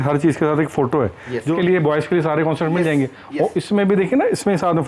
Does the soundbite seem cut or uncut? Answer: cut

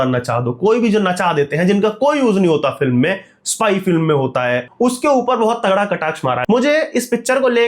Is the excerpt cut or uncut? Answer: cut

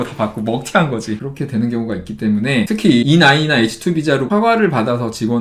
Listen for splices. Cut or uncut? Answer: cut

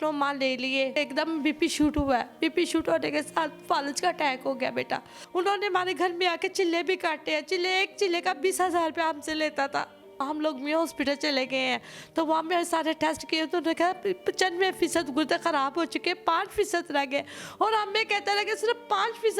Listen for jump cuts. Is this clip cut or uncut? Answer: cut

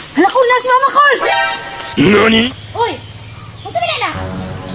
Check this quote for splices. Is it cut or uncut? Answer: uncut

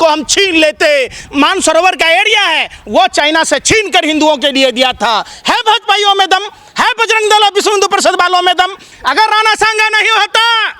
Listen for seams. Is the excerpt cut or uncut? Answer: cut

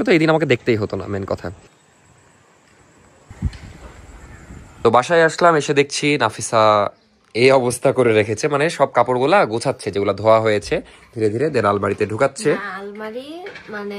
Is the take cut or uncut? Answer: uncut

